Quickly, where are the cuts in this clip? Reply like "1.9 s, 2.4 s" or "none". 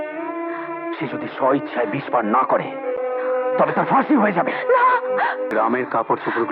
5.5 s